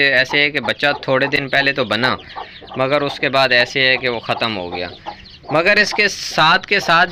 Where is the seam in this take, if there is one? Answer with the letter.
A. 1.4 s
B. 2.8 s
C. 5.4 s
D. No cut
D